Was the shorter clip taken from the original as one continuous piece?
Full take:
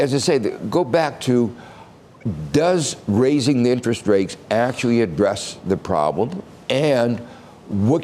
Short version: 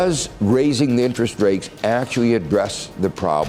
yes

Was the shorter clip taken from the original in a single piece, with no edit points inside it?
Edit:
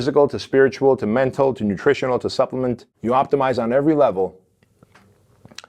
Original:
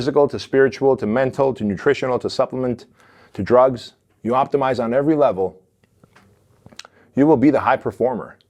no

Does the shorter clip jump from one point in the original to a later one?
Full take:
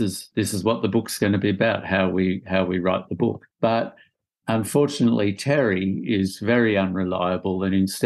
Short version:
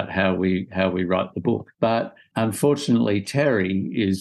yes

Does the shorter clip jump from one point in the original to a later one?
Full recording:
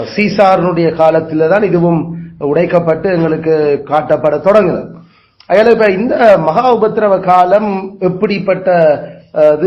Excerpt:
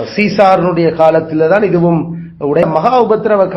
yes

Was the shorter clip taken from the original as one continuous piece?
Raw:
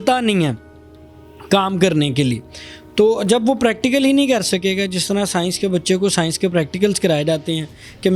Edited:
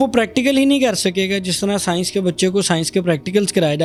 yes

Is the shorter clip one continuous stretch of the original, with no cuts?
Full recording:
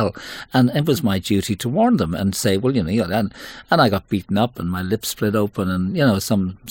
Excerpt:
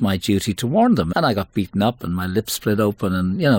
no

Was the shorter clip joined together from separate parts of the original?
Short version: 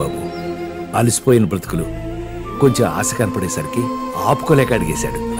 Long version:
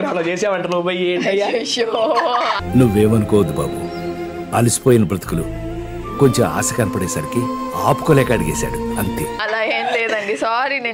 no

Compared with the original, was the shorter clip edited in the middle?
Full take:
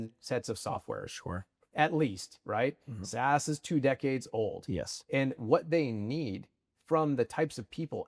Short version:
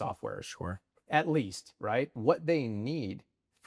yes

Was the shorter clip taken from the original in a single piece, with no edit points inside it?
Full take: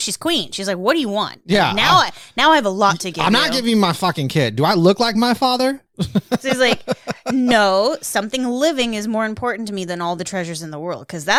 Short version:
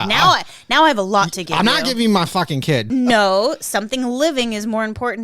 no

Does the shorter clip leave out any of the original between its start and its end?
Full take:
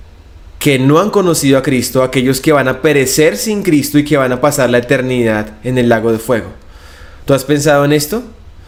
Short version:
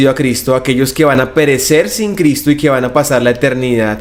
no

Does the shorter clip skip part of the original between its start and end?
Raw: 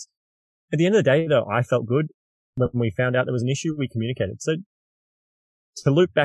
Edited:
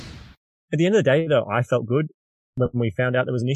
no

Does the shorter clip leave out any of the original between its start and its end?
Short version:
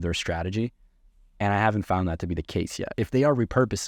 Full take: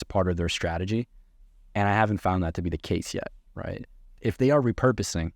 yes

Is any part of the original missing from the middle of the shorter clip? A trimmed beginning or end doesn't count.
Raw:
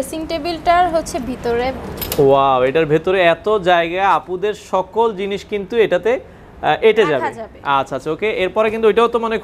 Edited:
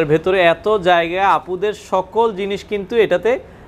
no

